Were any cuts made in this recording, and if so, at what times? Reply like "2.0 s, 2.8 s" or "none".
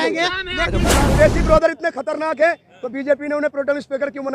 1.0 s